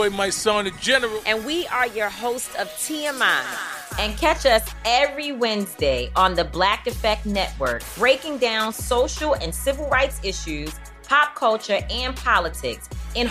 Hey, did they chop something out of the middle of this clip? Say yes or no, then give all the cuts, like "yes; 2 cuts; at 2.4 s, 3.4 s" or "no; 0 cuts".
no; 0 cuts